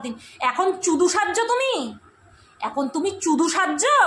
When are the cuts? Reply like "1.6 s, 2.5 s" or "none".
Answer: none